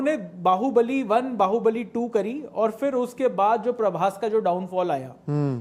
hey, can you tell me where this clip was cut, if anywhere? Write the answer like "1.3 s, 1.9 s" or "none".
none